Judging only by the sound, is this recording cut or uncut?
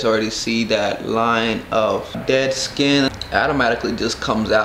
cut